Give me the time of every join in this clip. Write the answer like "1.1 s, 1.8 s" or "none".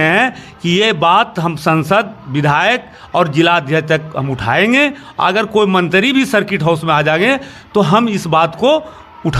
none

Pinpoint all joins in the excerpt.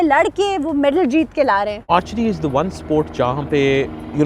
1.9 s

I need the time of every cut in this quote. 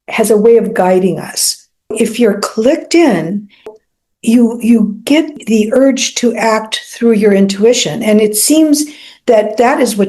1.9 s, 3.7 s, 5.3 s

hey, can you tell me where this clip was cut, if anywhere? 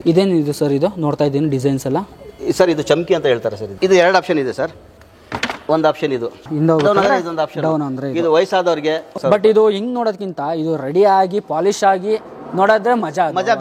3.7 s, 9.1 s

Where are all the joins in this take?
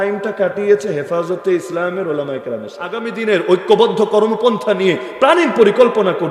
3.1 s

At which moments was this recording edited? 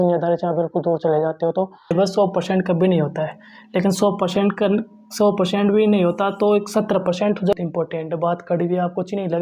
1.9 s, 7.5 s

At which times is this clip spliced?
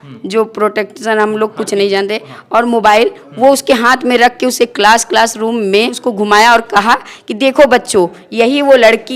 6.0 s

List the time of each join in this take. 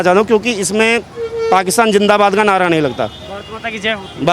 none

